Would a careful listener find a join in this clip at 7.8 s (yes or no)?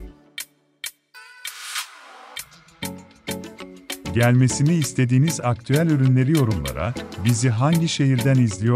no